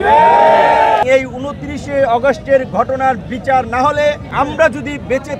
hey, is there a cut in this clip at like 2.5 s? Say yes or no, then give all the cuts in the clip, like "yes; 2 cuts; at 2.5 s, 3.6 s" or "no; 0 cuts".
no; 2 cuts; at 1.0 s, 4.2 s